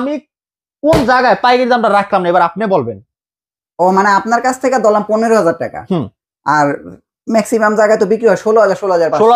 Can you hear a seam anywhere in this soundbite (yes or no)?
no